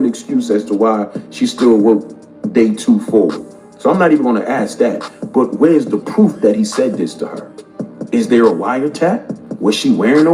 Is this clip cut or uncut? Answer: uncut